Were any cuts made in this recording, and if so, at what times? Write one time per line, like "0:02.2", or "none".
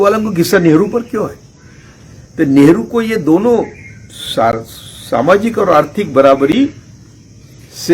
none